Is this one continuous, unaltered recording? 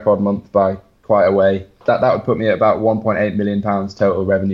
no; 1 cut; at 1.8 s

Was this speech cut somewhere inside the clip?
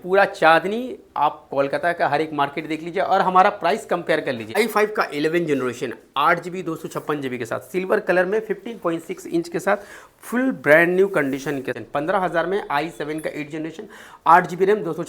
yes; 2 cuts; at 4.6 s, 11.7 s

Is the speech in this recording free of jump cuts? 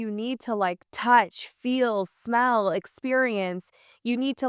yes; 0 cuts

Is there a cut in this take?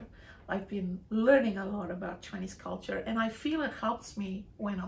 no; 0 cuts

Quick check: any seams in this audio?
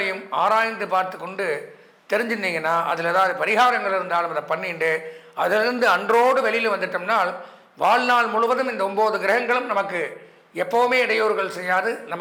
no; 0 cuts

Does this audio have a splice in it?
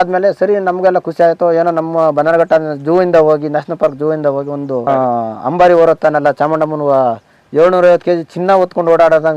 no; 0 cuts

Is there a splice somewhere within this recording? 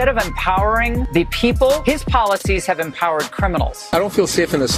yes; 3 cuts; at 1.0 s, 1.8 s, 3.9 s

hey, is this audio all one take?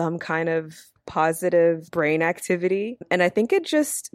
no; 3 cuts; at 1.0 s, 1.9 s, 3.0 s

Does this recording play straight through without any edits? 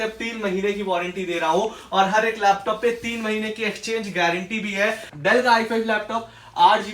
no; 1 cut; at 5.1 s

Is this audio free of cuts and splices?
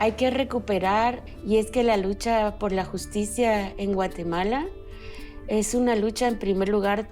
no; 1 cut; at 1.2 s

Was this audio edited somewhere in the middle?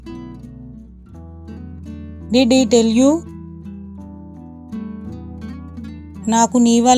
no; 0 cuts

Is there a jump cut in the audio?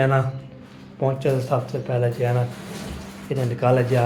no; 0 cuts

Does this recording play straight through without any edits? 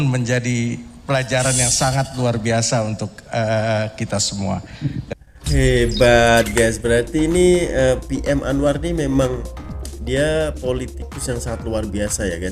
yes; 0 cuts

